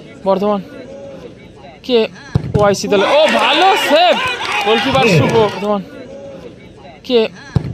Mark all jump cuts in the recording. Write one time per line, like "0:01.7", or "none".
0:05.6